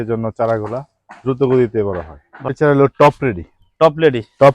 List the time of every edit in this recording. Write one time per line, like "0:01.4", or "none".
0:02.5